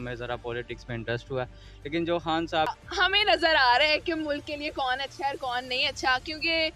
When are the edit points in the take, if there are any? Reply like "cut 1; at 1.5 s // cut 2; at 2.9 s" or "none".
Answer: cut 1; at 2.7 s

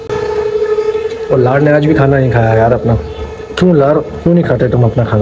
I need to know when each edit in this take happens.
none

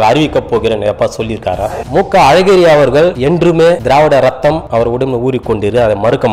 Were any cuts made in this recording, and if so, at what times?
cut 1; at 1.8 s // cut 2; at 3.5 s // cut 3; at 4.6 s

